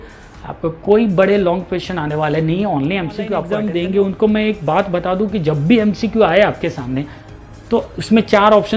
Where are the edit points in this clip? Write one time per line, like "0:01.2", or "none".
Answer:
0:03.4